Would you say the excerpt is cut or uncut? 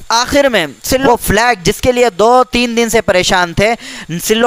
cut